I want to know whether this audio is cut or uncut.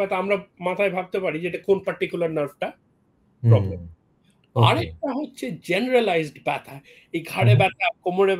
uncut